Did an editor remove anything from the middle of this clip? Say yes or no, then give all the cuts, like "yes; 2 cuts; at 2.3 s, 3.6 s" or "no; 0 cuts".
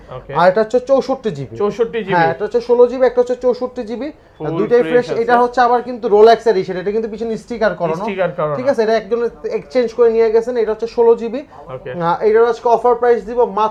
no; 0 cuts